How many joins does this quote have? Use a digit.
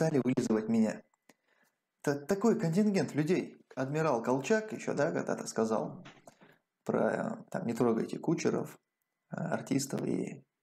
1